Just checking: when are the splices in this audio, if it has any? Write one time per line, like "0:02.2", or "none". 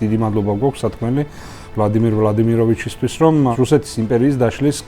0:03.5